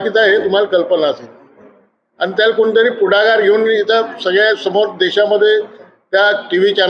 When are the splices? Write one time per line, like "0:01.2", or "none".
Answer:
none

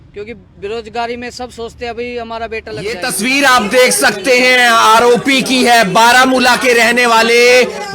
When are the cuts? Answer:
0:02.9

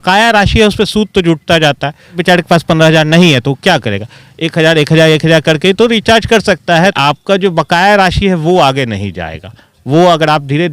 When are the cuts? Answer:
0:02.2
0:07.0

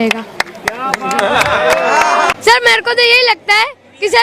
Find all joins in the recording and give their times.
0:02.3

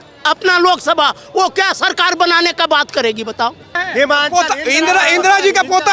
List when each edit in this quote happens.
0:03.8

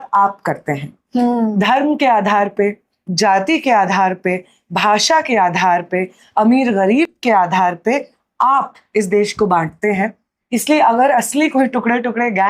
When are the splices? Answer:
none

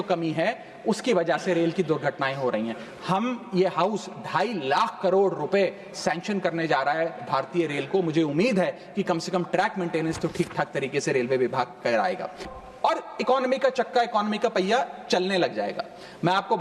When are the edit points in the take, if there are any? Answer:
0:12.5

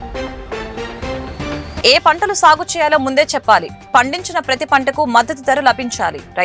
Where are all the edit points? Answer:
0:01.8

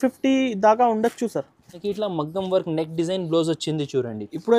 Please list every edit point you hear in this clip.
0:01.8

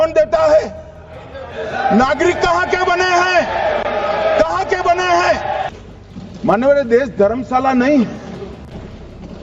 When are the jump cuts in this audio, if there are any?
0:05.7

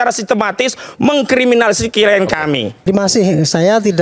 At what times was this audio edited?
0:02.9

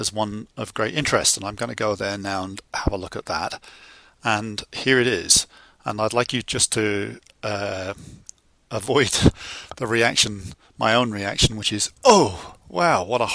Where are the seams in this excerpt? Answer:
0:07.2

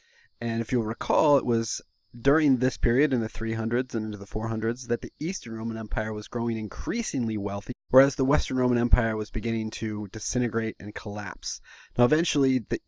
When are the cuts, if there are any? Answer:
0:03.9

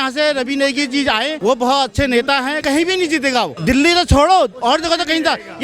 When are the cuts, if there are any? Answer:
0:01.3
0:02.6
0:03.5

